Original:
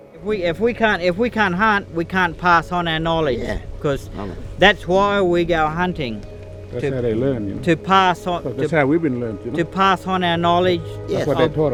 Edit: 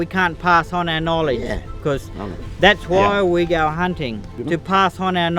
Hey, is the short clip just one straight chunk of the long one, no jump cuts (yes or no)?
no